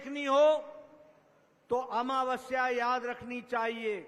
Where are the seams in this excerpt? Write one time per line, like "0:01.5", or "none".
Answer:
none